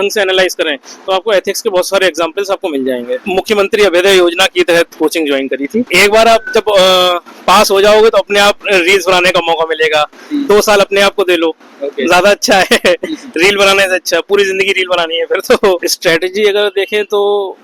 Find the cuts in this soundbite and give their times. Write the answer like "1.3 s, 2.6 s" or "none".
3.2 s, 5.9 s, 15.9 s